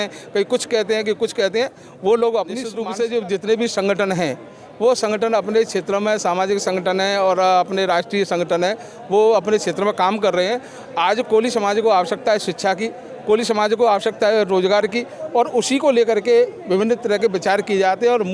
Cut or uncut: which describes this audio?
cut